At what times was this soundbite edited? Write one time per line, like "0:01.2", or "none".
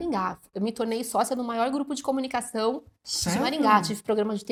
none